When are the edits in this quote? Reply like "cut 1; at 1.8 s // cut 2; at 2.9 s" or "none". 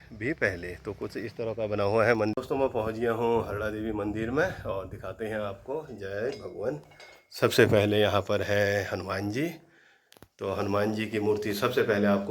cut 1; at 2.3 s